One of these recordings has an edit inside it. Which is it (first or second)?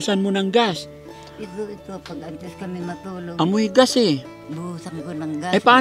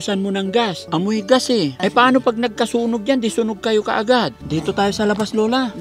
second